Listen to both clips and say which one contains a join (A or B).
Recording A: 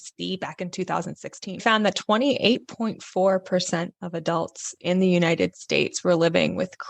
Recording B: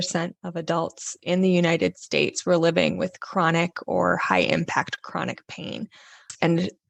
A